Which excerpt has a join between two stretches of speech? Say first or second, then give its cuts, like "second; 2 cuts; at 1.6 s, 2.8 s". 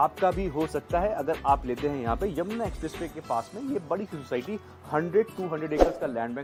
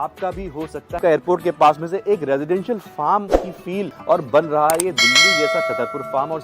second; 2 cuts; at 1.0 s, 3.9 s